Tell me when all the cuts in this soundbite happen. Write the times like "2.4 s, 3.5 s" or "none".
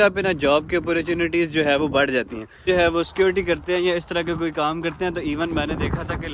2.7 s